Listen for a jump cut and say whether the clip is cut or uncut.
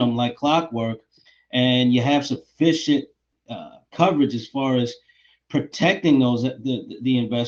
uncut